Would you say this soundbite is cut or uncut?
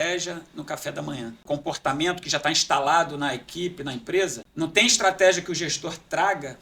cut